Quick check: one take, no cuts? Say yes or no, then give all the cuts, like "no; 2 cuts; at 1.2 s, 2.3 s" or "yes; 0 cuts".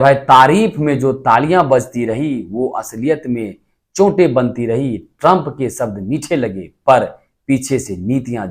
yes; 0 cuts